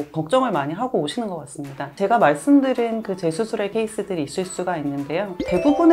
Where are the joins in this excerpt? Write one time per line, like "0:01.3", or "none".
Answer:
0:03.7